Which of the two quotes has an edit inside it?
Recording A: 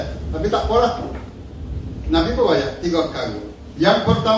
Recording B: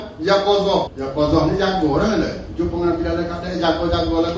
B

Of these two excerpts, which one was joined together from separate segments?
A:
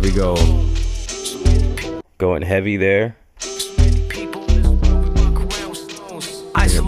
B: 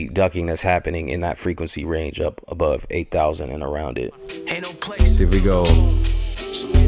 B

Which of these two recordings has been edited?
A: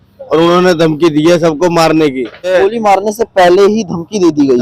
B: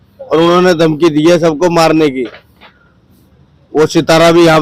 A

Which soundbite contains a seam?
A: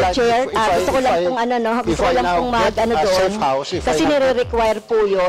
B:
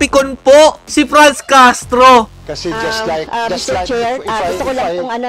B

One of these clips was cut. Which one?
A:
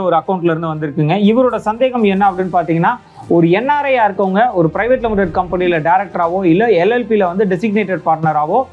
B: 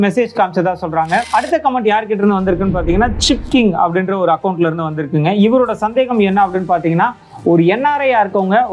B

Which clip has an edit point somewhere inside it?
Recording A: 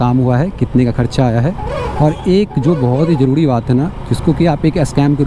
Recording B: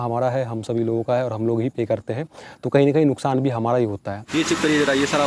B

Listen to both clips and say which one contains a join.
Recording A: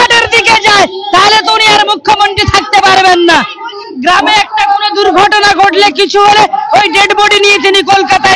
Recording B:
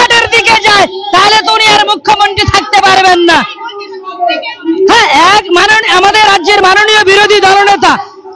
A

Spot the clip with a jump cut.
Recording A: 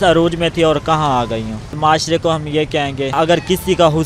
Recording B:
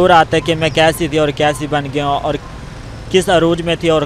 A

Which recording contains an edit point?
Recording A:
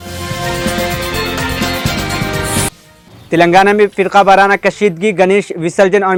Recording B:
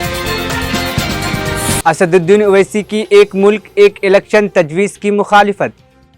B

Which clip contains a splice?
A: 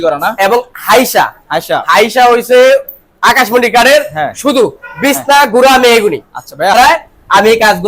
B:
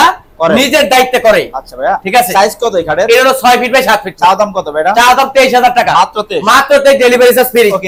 A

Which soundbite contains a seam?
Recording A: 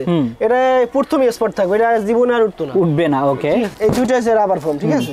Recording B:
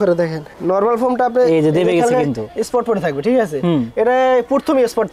A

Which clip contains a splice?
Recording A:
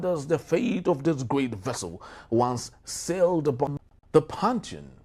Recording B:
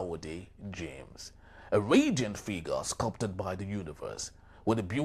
A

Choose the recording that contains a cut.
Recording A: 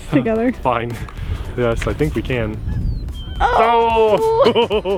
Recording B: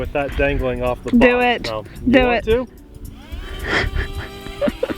B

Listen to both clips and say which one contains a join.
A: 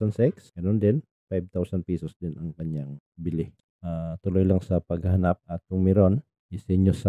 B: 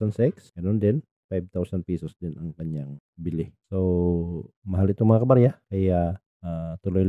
A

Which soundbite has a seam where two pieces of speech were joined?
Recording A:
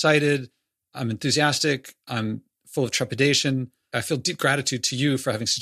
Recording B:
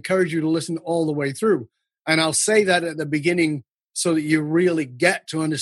A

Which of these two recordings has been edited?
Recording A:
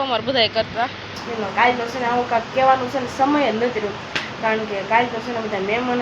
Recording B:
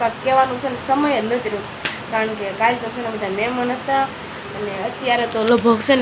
A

